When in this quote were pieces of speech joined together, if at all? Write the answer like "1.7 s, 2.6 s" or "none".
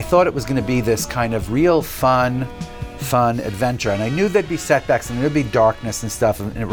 none